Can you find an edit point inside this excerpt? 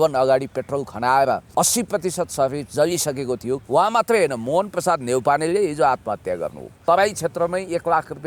yes; 3 cuts; at 1.5 s, 3.6 s, 6.8 s

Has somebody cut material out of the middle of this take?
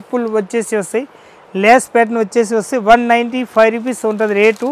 no; 0 cuts

